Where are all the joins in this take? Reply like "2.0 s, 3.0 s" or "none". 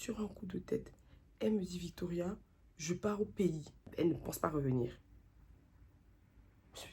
3.9 s